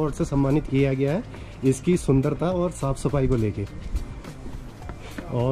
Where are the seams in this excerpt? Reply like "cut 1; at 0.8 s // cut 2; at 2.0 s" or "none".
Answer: none